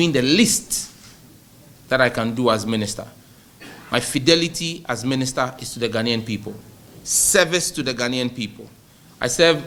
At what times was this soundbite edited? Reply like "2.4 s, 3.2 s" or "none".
none